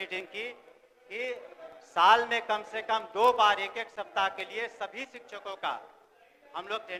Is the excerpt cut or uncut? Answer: uncut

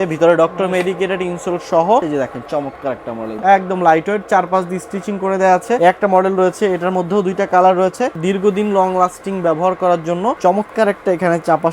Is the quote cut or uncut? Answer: cut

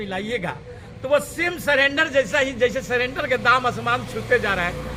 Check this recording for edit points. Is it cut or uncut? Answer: uncut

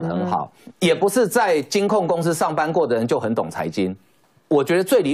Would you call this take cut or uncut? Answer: cut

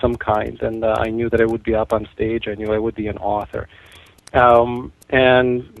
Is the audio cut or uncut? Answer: cut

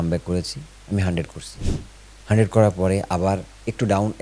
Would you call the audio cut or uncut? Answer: uncut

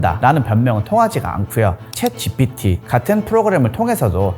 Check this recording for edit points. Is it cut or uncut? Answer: cut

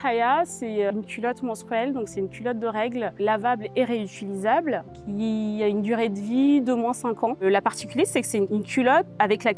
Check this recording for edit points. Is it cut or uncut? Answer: cut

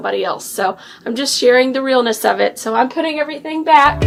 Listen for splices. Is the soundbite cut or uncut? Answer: uncut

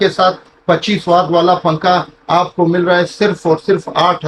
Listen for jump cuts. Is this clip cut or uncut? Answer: uncut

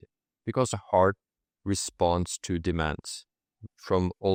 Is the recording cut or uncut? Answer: uncut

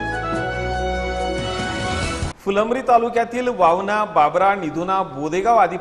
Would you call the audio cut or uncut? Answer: cut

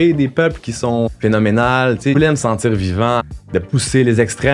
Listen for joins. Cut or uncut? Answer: cut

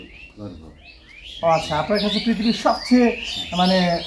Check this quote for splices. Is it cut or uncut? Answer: uncut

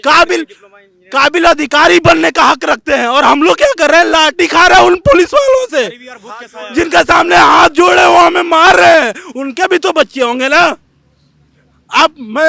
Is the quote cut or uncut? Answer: uncut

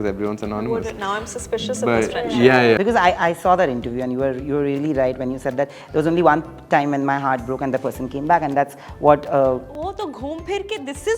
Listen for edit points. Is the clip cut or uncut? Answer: cut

